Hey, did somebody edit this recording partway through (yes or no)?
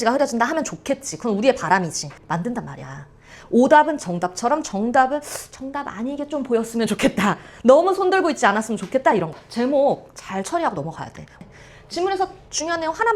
yes